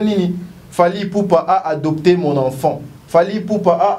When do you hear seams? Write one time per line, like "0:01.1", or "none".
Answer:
none

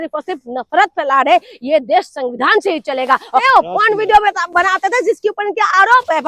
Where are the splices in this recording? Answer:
0:03.4

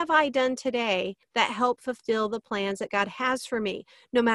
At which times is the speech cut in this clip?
0:01.2

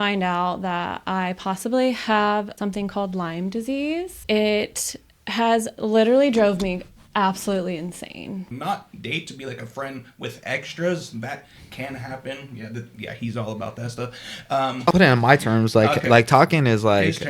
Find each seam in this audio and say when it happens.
0:02.5
0:04.2
0:08.5
0:14.9

